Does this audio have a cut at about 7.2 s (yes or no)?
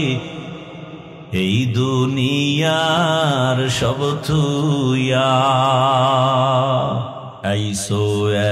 yes